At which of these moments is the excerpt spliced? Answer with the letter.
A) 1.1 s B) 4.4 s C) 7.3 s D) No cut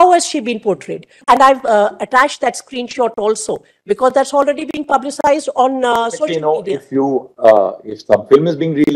A